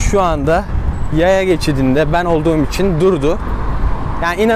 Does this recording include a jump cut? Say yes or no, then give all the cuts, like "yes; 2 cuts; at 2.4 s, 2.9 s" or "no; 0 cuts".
no; 0 cuts